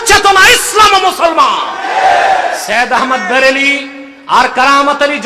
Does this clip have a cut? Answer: yes; 1 cut; at 2.6 s

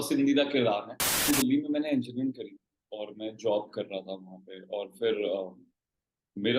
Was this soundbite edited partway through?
yes; 1 cut; at 1.3 s

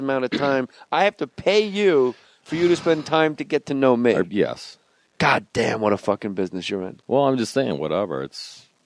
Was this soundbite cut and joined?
no; 0 cuts

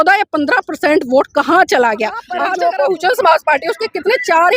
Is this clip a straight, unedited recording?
no; 1 cut; at 2.3 s

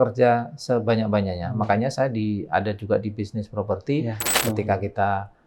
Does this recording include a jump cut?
yes; 1 cut; at 4.2 s

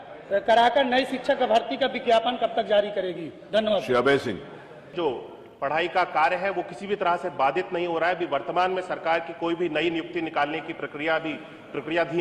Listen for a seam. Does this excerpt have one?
yes; 1 cut; at 4.9 s

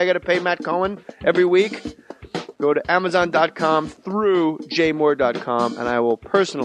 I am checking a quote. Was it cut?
yes; 1 cut; at 4.6 s

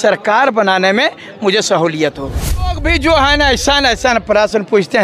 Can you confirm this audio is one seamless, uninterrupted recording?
no; 1 cut; at 2.7 s

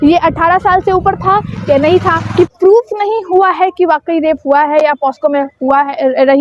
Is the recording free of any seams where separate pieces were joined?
no; 1 cut; at 2.2 s

